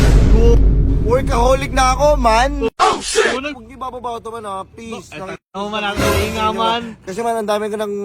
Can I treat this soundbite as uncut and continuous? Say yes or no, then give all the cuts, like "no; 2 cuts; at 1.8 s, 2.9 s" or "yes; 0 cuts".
no; 1 cut; at 3.6 s